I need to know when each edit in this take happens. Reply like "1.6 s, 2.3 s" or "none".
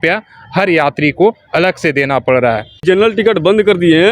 2.7 s